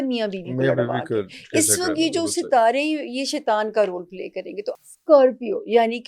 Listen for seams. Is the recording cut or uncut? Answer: cut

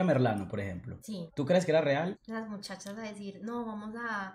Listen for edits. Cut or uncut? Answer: cut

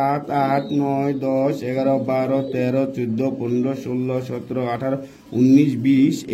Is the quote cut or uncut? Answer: uncut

